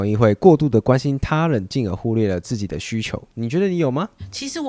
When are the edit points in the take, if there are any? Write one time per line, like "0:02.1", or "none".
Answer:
none